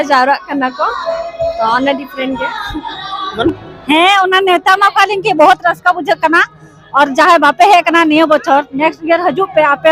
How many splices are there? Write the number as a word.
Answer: one